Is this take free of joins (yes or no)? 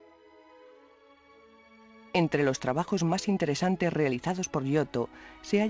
yes